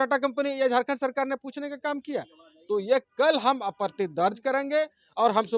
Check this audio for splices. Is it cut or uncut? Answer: uncut